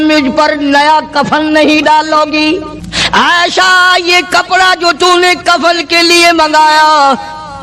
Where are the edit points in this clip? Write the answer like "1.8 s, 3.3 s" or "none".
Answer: 2.5 s